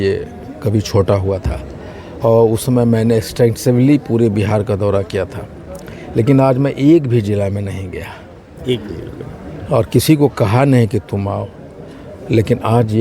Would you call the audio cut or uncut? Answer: uncut